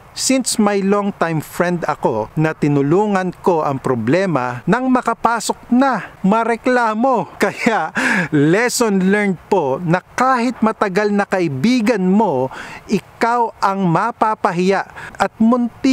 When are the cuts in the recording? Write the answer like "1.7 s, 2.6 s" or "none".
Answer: 2.3 s, 4.5 s, 6.1 s, 7.3 s, 15.1 s